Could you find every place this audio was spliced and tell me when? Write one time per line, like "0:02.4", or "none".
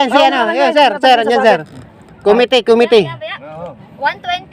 none